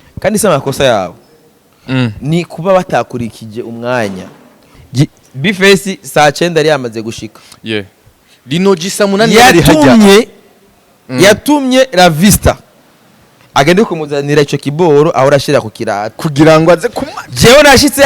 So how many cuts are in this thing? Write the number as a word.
one